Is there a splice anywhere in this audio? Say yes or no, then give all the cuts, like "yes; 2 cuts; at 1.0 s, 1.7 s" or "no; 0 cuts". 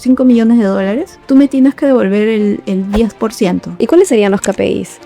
yes; 2 cuts; at 1.1 s, 3.7 s